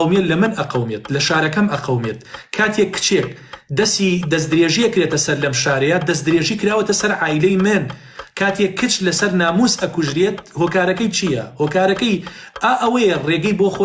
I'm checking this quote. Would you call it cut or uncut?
uncut